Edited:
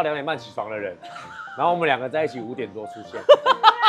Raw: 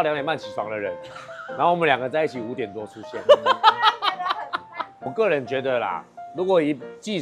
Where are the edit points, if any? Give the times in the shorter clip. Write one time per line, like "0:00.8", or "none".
none